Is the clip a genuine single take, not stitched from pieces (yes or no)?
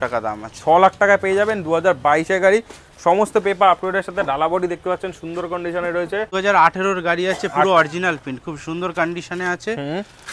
no